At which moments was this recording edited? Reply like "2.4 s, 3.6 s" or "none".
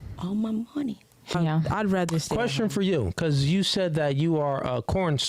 1.3 s

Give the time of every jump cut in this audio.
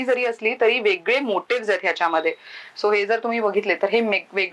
none

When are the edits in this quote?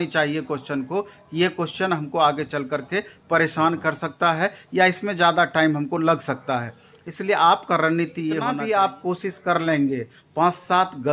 8.5 s

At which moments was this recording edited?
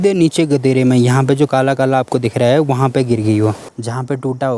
3.6 s

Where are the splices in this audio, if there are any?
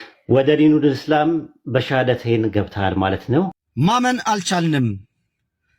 3.5 s

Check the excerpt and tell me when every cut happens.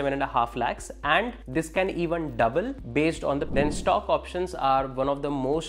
3.5 s

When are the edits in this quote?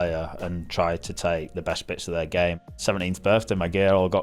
2.8 s

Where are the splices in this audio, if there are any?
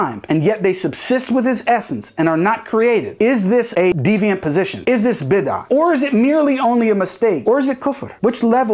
3.9 s, 7.4 s

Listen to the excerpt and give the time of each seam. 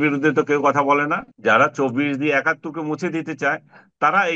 1.2 s

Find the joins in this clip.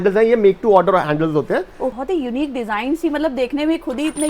2.0 s

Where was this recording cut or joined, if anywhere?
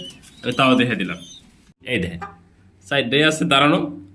1.8 s

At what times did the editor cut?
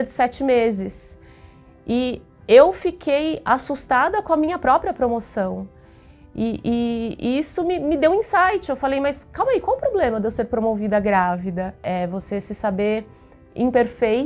11.8 s

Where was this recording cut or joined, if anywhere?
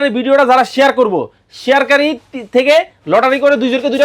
none

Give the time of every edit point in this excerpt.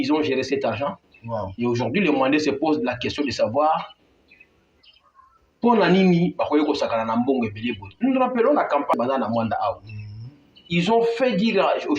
8.9 s

